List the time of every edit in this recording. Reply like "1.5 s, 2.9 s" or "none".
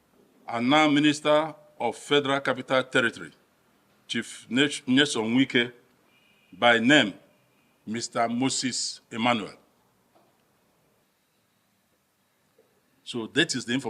11.0 s